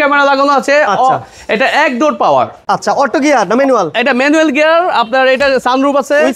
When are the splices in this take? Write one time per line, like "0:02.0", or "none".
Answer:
0:02.6